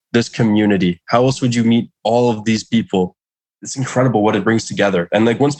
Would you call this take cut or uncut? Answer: cut